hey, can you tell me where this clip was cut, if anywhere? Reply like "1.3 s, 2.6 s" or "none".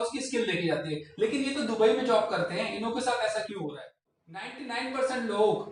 4.5 s

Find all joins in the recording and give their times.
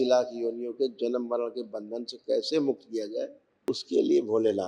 3.4 s

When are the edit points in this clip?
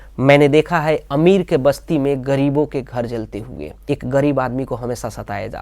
3.7 s

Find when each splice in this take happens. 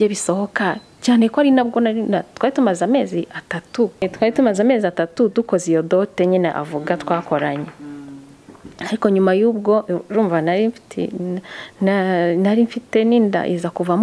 4.1 s

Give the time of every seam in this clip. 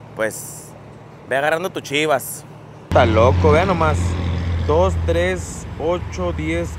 2.9 s

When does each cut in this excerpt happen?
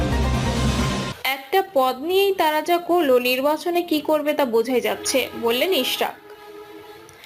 1.1 s

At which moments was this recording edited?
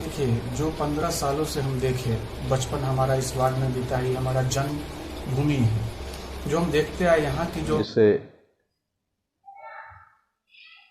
7.8 s

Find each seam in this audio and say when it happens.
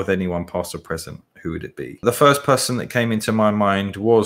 2.0 s

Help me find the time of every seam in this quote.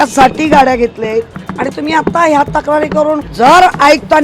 1.4 s, 3.3 s

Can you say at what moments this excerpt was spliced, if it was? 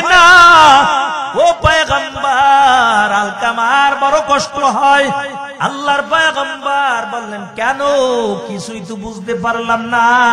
1.2 s, 5.5 s

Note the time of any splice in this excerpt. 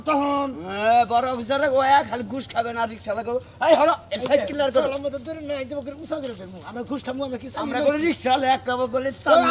none

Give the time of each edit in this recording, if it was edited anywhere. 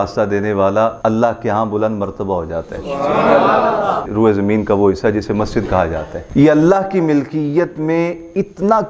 1.0 s, 4.1 s, 6.1 s

